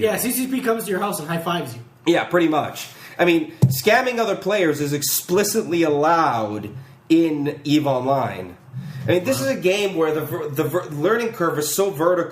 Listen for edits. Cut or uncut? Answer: cut